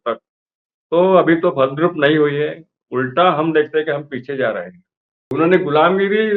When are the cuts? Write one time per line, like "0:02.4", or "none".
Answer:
0:05.3